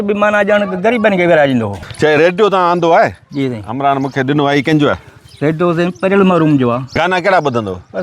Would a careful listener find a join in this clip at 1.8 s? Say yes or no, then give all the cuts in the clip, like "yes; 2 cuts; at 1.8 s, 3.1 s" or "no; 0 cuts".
yes; 2 cuts; at 1.8 s, 7.0 s